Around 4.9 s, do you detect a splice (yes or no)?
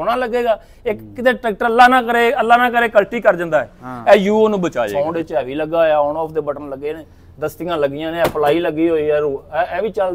yes